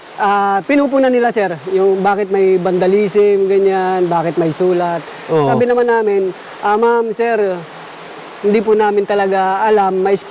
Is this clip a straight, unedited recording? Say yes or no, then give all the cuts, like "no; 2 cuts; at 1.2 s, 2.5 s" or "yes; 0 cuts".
yes; 0 cuts